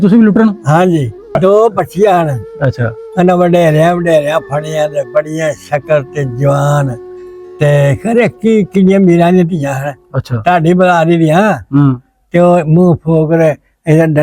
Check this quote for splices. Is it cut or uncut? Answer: cut